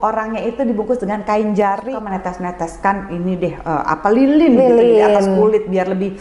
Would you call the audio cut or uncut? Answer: cut